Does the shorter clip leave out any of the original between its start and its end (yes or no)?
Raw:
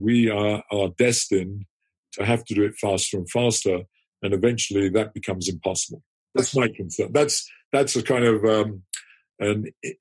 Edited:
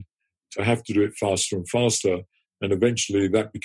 no